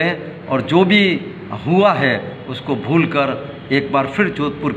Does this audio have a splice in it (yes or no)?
no